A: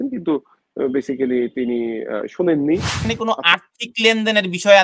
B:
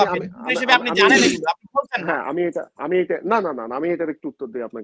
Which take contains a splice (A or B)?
A